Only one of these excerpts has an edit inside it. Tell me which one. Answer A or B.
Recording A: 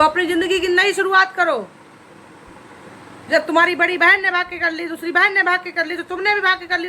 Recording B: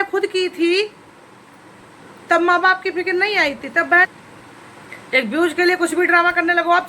B